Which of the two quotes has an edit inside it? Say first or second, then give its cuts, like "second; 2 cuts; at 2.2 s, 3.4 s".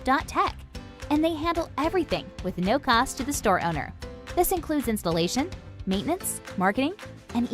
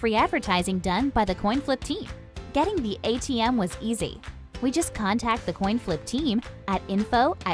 first; 1 cut; at 2.1 s